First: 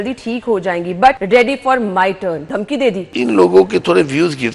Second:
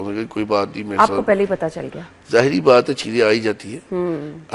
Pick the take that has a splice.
first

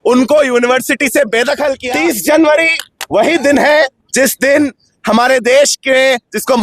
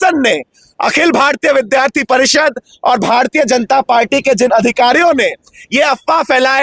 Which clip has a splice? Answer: first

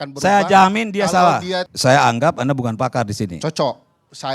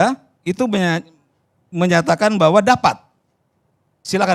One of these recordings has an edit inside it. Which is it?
first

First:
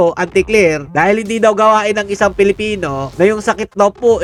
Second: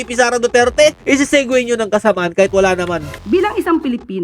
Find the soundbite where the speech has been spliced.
second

